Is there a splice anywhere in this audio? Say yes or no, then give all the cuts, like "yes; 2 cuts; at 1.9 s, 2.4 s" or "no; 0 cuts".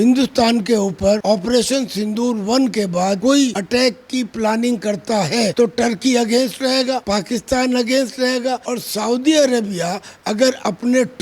no; 0 cuts